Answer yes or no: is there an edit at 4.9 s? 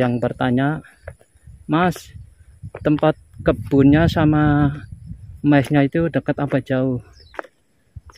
no